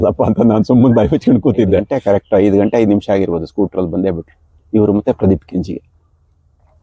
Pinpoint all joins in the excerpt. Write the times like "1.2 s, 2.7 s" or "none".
1.9 s